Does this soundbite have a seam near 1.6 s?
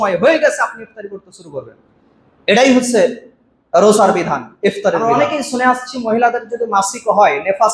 no; 1 cut; at 5.1 s

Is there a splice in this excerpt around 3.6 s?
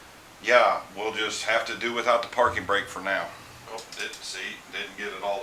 yes; 1 cut; at 3.6 s

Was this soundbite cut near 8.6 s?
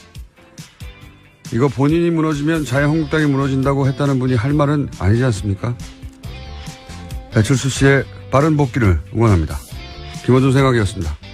yes; 1 cut; at 8.6 s

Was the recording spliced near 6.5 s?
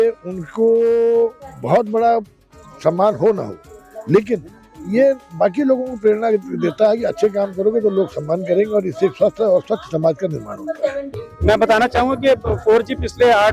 no; 1 cut; at 11.1 s

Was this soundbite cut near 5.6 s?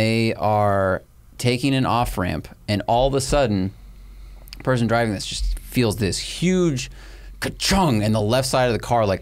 no; 0 cuts

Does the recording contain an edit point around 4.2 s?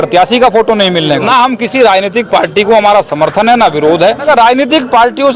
yes; 2 cuts; at 1.2 s, 4.2 s

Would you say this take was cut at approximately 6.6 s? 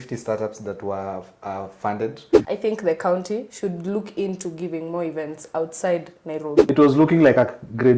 yes; 2 cuts; at 2.3 s, 6.6 s

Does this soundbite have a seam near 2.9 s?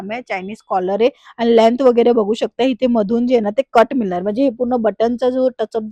no; 0 cuts

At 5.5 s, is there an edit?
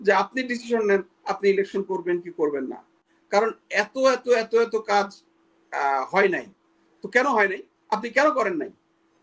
no; 1 cut; at 3.1 s

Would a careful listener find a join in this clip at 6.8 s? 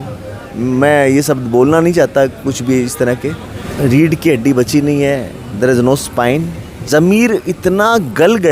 yes; 2 cuts; at 3.6 s, 6.8 s

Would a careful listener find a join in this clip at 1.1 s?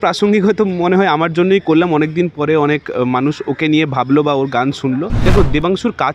no; 1 cut; at 5.1 s

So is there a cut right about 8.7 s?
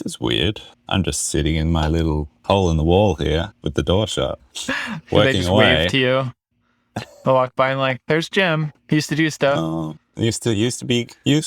yes; 4 cuts; at 3.6 s, 4.4 s, 8.7 s, 10.0 s

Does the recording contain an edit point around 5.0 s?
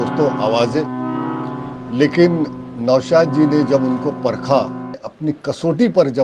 yes; 1 cut; at 5.0 s

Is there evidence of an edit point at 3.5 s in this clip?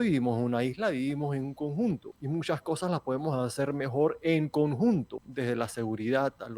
no; 2 cuts; at 2.1 s, 5.2 s

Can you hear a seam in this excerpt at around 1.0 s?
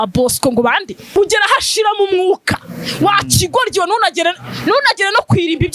yes; 1 cut; at 1.0 s

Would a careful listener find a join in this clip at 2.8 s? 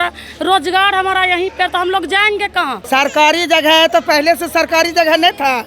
yes; 1 cut; at 2.8 s

